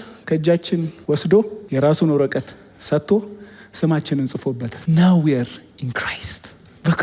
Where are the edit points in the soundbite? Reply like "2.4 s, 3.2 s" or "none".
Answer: 0.9 s, 1.6 s, 4.7 s